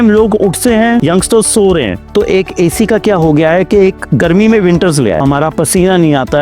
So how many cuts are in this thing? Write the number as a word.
three